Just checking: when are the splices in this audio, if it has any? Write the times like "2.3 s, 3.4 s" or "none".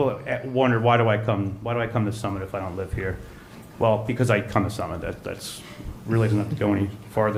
none